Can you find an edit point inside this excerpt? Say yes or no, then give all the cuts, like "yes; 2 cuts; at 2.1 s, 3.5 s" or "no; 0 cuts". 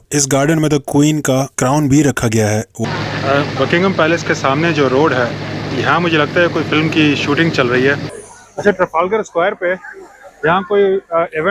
yes; 2 cuts; at 2.8 s, 8.1 s